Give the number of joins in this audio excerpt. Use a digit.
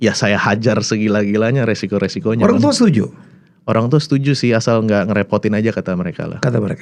0